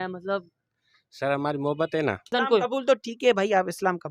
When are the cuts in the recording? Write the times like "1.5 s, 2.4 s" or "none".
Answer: 2.3 s

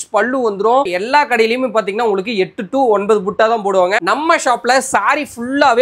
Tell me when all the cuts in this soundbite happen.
0.9 s, 4.0 s

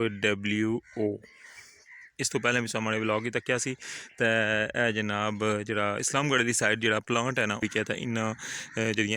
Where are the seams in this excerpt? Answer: 7.6 s

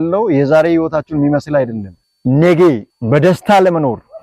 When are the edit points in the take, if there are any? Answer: 2.1 s

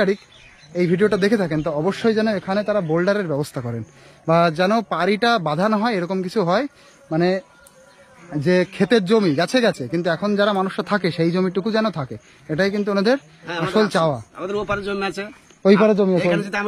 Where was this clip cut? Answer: none

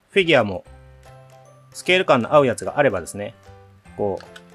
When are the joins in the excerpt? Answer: none

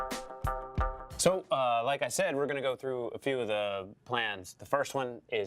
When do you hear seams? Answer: 1.0 s

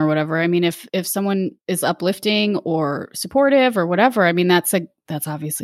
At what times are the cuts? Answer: 1.4 s

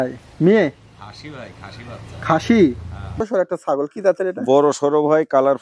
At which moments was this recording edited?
3.2 s

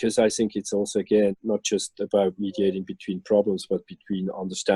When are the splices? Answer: none

